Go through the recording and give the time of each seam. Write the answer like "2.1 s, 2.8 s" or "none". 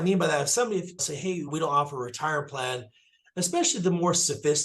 1.3 s